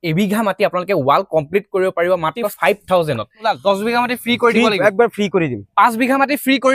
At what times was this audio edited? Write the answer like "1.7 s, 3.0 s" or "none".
2.5 s, 3.5 s